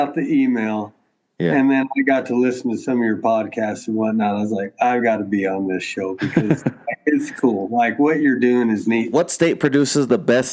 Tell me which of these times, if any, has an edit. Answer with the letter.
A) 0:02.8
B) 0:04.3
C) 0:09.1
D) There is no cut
C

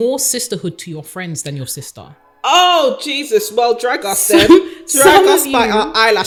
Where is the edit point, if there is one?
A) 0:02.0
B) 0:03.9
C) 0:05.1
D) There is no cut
D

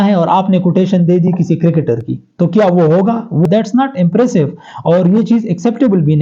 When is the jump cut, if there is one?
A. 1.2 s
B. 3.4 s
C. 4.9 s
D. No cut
B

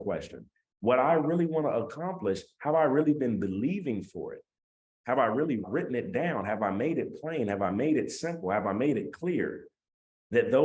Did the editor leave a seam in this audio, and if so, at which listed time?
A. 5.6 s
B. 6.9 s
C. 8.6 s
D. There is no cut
A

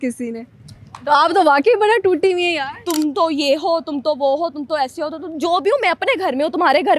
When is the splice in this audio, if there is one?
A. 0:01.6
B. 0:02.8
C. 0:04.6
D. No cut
B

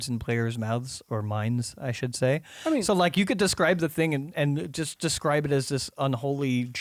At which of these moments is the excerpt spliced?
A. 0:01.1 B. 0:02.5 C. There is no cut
C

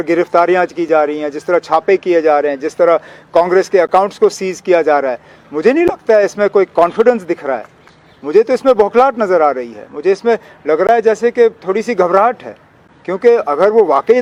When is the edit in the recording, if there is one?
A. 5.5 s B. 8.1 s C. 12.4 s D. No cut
D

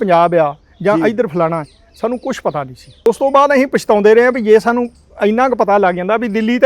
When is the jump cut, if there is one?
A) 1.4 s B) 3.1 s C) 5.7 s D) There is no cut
B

